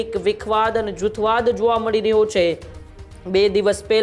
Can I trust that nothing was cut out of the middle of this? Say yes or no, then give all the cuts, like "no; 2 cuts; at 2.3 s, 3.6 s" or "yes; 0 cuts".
yes; 0 cuts